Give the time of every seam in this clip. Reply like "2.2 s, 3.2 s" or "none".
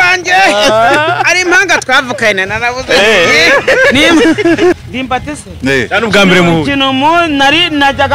4.8 s